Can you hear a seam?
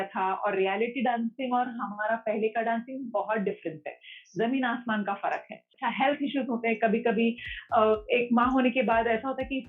yes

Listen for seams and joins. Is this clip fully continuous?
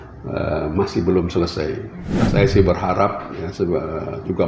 no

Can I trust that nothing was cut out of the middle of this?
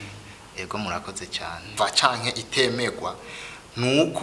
no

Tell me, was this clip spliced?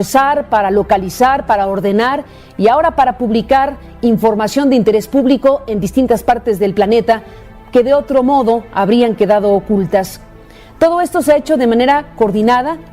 yes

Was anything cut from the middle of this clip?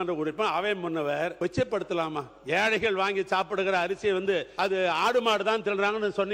yes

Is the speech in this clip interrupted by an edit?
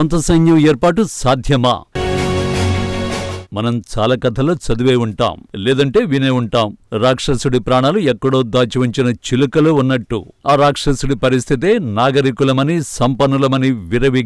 yes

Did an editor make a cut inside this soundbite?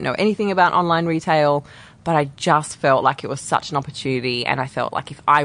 no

